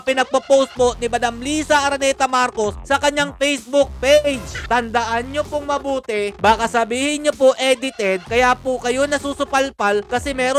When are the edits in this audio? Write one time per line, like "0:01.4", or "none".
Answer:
0:04.6